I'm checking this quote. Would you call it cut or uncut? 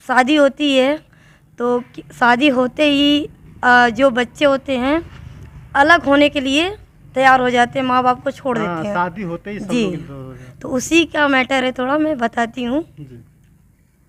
uncut